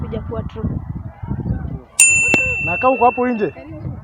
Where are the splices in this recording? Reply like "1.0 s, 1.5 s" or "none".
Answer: 2.1 s